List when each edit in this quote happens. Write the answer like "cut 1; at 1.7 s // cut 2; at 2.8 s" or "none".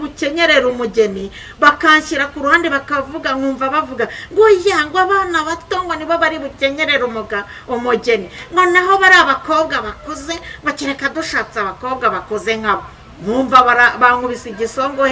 none